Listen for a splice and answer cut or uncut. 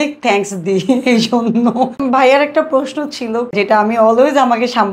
cut